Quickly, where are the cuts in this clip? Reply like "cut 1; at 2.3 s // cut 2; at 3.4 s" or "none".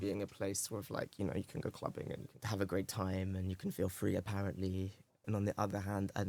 cut 1; at 2.3 s // cut 2; at 5.2 s